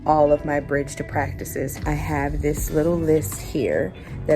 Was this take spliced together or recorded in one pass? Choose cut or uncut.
cut